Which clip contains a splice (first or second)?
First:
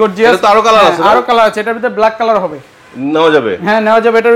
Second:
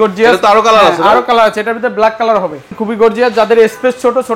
second